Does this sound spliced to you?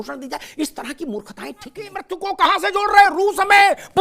yes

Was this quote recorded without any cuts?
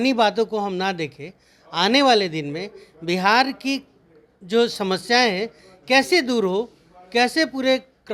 yes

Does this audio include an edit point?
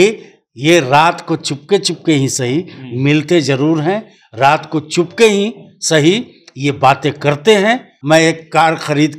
yes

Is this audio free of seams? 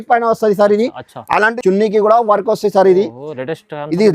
no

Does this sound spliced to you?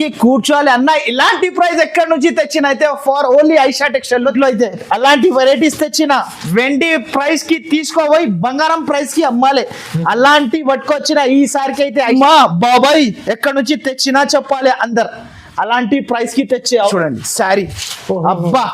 yes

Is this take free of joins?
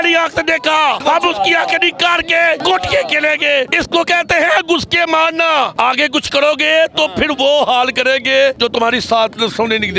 no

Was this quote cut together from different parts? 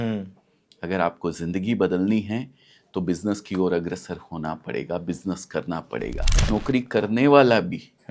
yes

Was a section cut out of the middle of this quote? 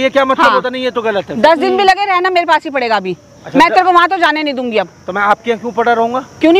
no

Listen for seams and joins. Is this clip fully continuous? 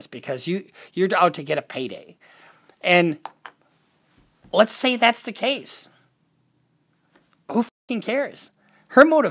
yes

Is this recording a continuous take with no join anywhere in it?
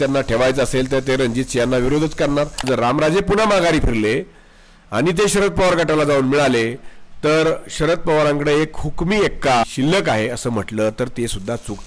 no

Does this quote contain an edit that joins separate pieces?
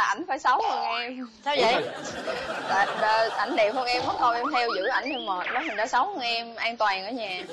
no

